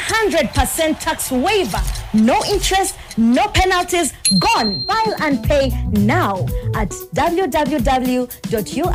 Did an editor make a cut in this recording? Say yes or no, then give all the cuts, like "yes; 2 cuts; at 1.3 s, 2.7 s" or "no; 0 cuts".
no; 0 cuts